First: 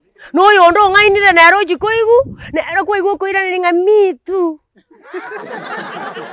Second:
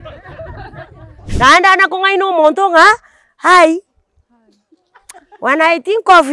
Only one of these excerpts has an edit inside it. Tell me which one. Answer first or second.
second